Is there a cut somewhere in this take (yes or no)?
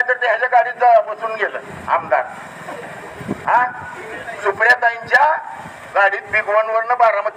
no